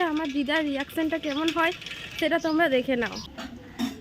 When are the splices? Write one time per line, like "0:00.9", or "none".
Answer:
0:03.0